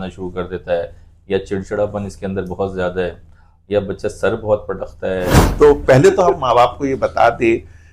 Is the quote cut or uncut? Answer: cut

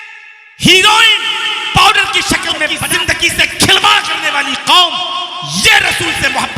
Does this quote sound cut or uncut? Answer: cut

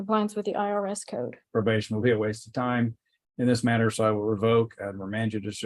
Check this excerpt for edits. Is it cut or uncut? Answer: cut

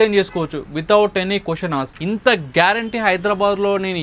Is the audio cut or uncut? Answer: cut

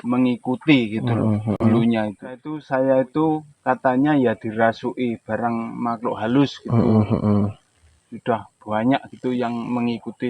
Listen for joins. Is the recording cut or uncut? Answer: cut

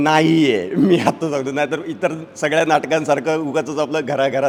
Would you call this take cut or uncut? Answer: uncut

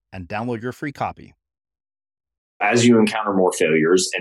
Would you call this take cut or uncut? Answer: cut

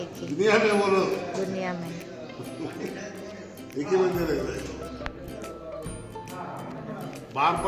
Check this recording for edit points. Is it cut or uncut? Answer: uncut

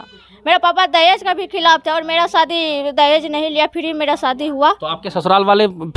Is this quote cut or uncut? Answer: uncut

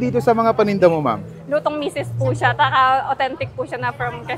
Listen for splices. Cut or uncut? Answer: uncut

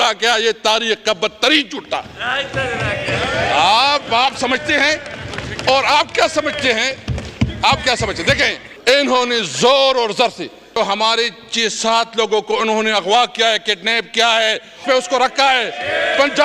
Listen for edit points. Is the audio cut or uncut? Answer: cut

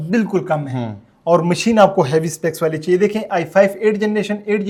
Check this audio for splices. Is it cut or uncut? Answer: uncut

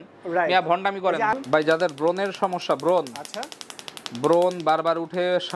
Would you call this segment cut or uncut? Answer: cut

